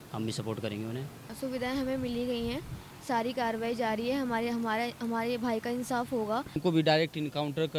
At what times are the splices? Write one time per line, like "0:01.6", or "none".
0:01.3
0:06.6